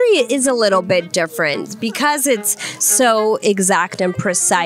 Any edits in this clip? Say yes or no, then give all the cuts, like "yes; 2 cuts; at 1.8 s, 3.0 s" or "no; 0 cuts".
no; 0 cuts